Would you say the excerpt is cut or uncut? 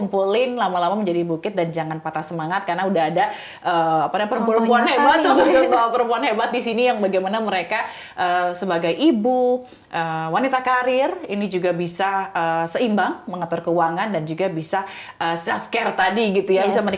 uncut